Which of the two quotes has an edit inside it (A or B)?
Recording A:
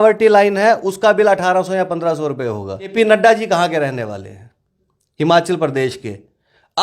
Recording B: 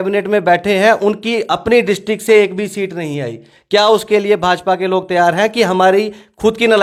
A